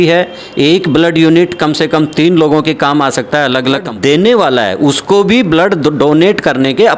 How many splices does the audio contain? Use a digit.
1